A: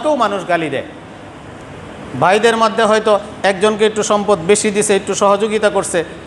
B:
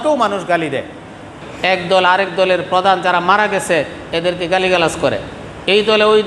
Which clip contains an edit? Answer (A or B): B